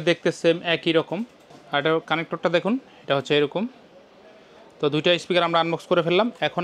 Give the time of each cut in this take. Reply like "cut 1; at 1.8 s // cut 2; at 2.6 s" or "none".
none